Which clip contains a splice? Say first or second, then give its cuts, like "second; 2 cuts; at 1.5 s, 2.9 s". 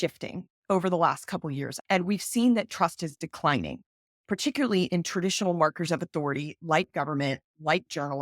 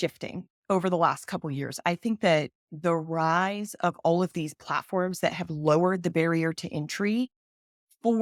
first; 1 cut; at 1.7 s